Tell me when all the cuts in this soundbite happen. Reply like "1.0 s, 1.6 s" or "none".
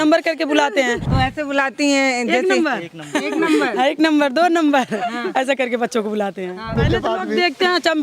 1.0 s, 6.8 s